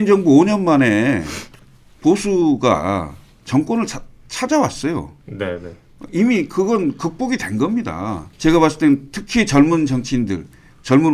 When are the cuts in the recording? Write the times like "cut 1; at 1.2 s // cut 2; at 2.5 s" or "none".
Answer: cut 1; at 8.3 s

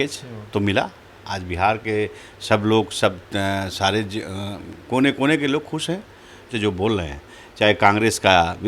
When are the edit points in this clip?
cut 1; at 6.5 s

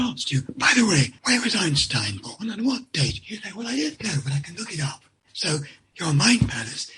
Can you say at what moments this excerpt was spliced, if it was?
cut 1; at 1.2 s

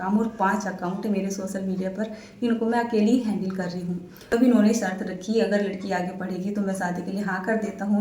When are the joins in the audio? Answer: cut 1; at 4.3 s

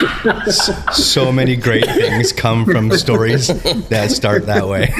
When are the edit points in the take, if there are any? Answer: none

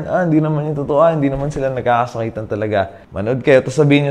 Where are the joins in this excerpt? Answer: cut 1; at 3.0 s

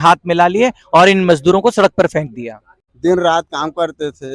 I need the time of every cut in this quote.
cut 1; at 2.8 s

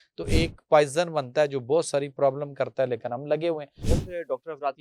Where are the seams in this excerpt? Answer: cut 1; at 3.8 s

